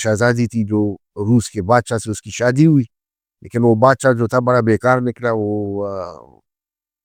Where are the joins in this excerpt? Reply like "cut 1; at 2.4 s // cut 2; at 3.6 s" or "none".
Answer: none

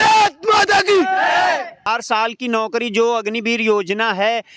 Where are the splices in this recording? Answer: cut 1; at 1.9 s

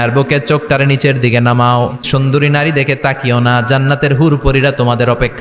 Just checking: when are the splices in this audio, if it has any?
cut 1; at 2.0 s

